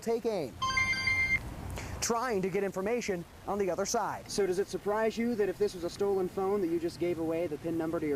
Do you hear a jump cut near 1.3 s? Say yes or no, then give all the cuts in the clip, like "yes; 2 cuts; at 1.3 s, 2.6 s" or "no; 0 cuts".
no; 1 cut; at 4.2 s